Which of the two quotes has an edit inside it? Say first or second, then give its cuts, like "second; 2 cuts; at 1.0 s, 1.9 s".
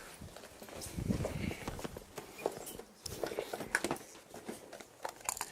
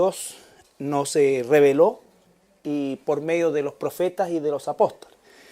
second; 1 cut; at 4.4 s